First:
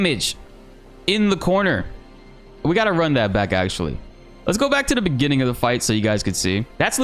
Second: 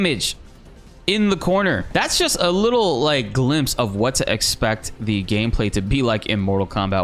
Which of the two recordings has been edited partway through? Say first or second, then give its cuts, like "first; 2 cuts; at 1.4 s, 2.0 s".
second; 1 cut; at 1.8 s